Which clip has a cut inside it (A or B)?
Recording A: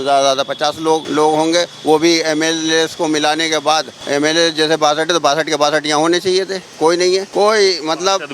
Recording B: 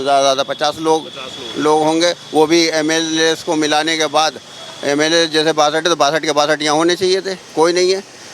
A